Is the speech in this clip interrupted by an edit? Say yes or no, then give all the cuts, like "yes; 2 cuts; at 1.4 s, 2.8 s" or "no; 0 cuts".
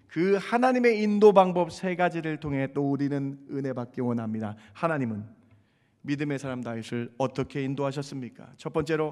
no; 0 cuts